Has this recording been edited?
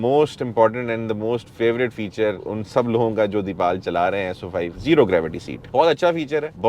yes; 2 cuts; at 2.4 s, 4.8 s

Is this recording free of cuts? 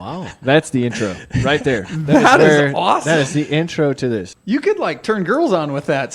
no; 1 cut; at 4.3 s

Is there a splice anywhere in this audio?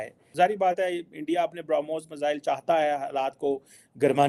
no; 0 cuts

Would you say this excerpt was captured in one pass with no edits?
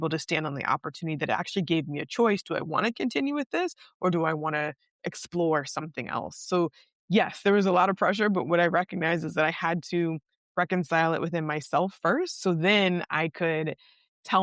yes; 0 cuts

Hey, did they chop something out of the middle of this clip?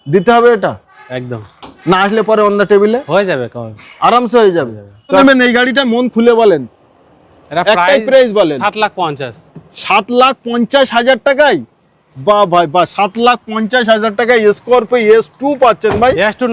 yes; 1 cut; at 5.2 s

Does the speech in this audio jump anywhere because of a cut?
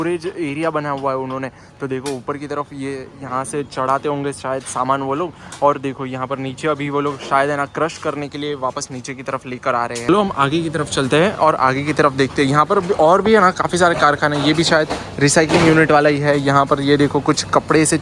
no; 0 cuts

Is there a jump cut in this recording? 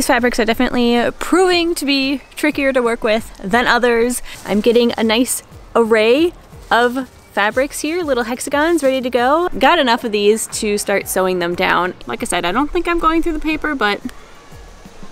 yes; 3 cuts; at 4.3 s, 9.5 s, 12.0 s

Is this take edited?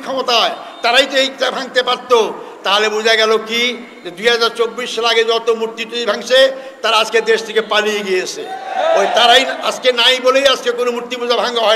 no; 0 cuts

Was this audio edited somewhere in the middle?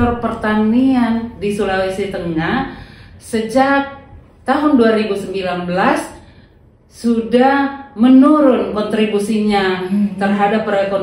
no; 0 cuts

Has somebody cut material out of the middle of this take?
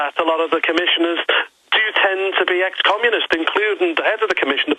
no; 0 cuts

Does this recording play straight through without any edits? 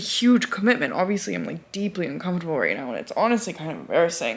yes; 0 cuts

